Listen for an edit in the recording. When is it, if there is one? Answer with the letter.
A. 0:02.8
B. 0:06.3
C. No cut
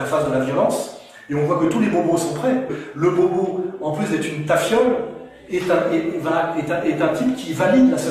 A